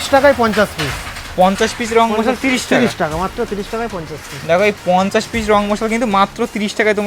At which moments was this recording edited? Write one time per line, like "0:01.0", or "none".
none

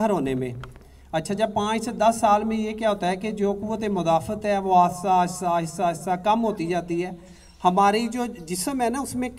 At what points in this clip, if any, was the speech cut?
none

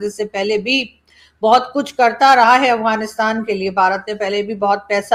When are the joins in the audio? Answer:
none

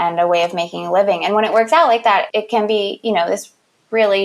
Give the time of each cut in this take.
0:02.3

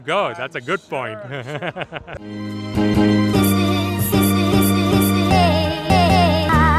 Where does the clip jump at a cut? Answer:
0:02.0

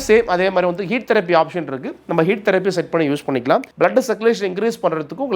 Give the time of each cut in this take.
0:03.7

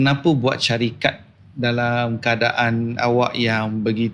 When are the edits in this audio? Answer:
none

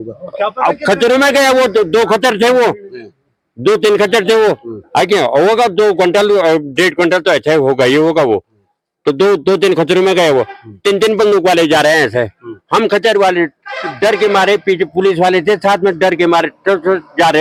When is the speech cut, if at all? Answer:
none

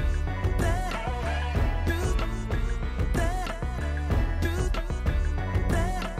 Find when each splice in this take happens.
0:01.1

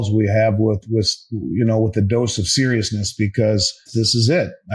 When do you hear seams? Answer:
0:03.9

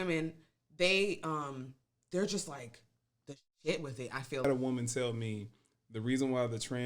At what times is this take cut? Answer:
0:04.4

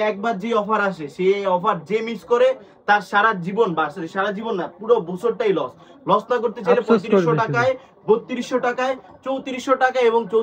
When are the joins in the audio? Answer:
none

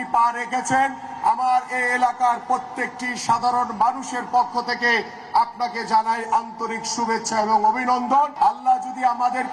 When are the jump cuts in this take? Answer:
0:08.3

